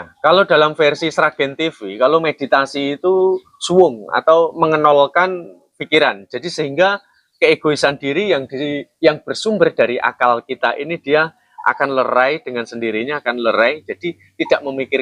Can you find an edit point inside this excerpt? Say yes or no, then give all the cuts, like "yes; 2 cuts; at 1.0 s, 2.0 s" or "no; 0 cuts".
no; 0 cuts